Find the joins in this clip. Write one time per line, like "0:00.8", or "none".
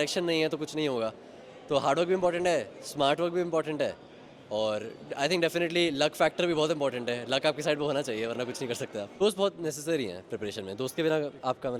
0:09.2